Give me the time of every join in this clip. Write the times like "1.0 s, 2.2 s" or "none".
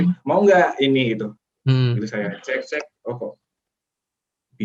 1.5 s